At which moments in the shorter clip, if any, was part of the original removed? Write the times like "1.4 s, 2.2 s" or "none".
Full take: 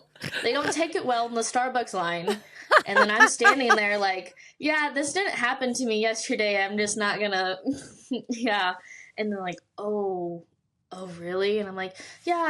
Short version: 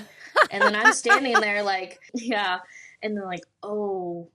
2.1 s